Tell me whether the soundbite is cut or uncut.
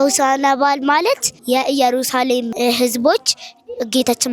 cut